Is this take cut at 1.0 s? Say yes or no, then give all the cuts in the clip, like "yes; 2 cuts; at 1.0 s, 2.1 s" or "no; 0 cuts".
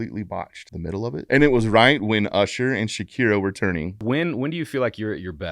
yes; 2 cuts; at 1.0 s, 4.0 s